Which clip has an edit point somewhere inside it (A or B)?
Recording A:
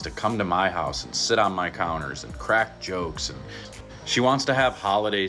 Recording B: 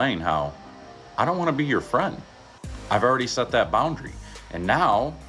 A